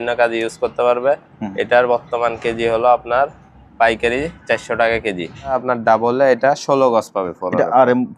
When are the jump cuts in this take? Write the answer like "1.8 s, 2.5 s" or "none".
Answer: 5.5 s